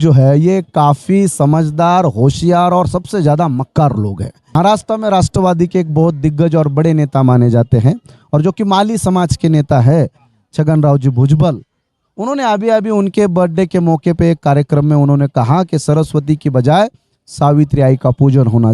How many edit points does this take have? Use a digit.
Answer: 1